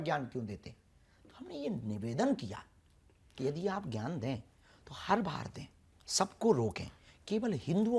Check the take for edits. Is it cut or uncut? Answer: uncut